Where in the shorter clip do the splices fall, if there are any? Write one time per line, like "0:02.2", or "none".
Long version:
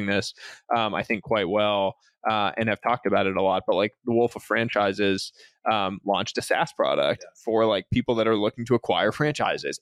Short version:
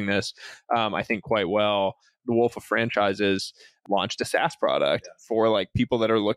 0:02.2
0:03.8